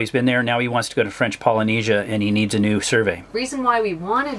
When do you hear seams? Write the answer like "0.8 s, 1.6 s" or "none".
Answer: 3.3 s